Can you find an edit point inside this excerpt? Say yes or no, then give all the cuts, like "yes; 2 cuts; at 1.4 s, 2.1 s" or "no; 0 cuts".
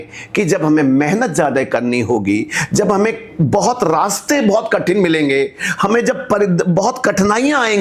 no; 0 cuts